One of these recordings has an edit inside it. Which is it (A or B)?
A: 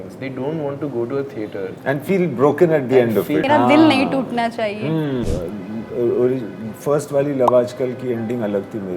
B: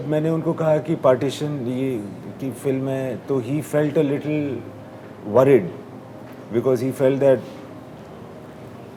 A